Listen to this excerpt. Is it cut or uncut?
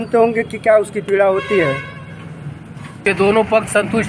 cut